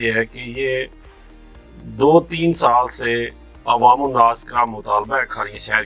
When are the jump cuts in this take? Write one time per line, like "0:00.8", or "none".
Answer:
none